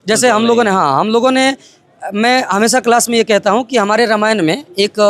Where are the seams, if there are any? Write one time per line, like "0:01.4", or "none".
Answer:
none